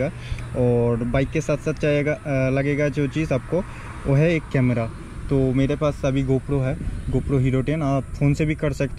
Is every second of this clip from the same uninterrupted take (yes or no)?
yes